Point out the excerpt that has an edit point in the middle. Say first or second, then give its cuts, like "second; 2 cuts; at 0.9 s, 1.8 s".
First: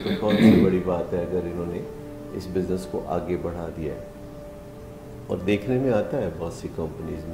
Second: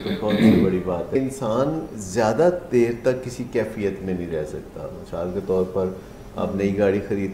second; 1 cut; at 1.2 s